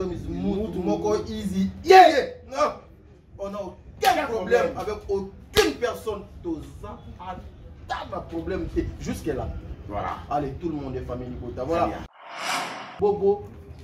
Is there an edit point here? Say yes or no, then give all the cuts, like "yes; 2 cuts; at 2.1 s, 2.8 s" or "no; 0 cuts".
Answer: yes; 1 cut; at 12.3 s